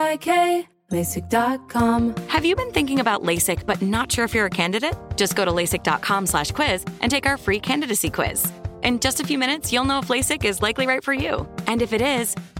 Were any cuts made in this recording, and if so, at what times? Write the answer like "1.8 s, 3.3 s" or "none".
2.0 s